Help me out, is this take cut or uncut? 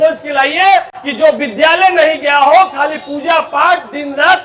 uncut